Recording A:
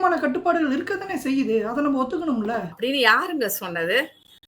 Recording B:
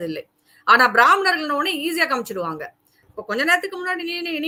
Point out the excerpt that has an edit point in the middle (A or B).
A